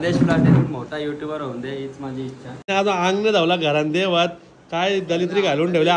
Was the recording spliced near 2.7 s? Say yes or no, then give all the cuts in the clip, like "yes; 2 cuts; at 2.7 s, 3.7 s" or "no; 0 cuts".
yes; 1 cut; at 2.7 s